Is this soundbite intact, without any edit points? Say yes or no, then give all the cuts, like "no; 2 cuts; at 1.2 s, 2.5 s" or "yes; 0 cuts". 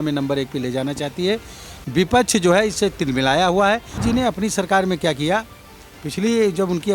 no; 1 cut; at 4.0 s